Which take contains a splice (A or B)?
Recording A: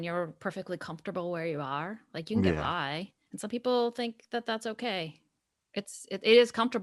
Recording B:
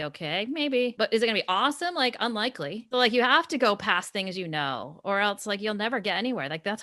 B